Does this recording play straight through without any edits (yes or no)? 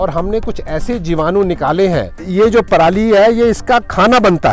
no